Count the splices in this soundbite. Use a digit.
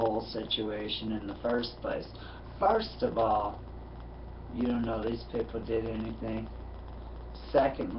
1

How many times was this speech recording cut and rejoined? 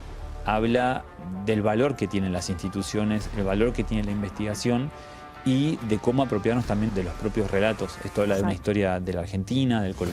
2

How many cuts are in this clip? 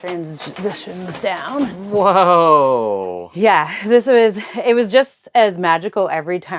0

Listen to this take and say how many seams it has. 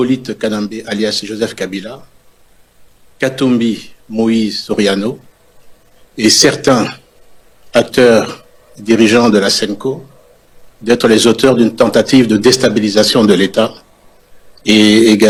0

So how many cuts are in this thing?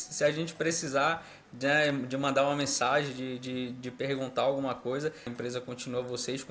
1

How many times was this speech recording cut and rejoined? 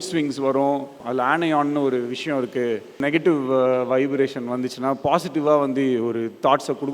2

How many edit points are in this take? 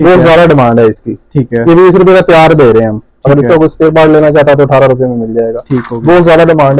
0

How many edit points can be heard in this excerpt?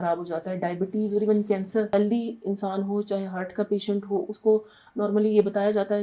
1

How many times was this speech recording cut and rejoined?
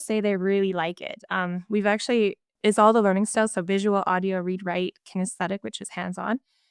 1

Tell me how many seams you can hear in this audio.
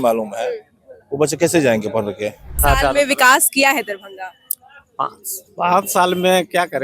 1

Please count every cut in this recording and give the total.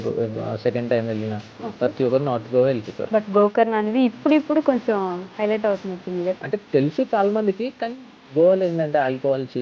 2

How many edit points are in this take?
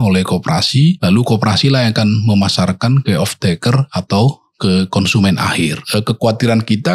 2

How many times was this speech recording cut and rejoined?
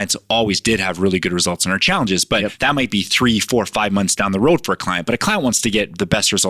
1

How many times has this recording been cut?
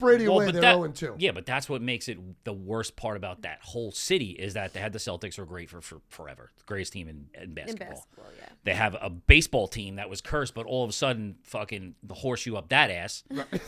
1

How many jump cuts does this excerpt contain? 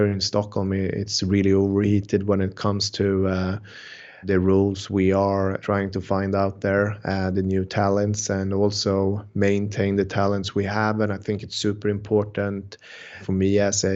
2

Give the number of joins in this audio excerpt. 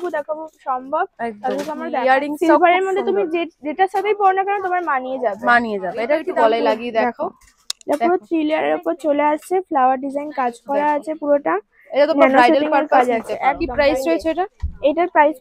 3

